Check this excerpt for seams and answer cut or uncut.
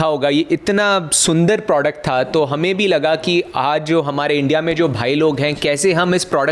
uncut